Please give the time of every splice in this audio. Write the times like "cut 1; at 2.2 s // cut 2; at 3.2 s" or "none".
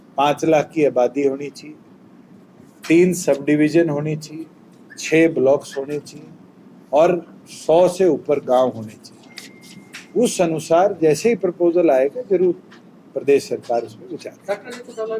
none